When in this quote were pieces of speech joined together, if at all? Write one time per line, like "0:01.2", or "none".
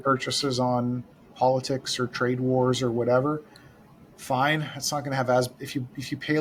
none